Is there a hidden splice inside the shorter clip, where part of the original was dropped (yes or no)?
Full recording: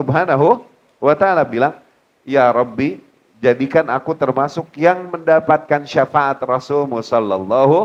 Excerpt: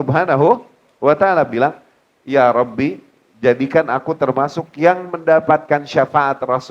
no